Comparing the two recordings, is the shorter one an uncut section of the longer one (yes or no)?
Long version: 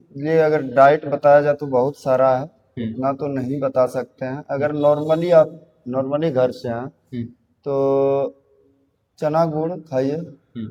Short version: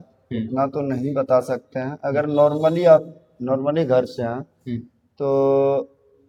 yes